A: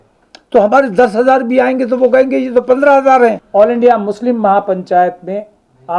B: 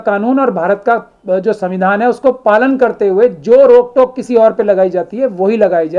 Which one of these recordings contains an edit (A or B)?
A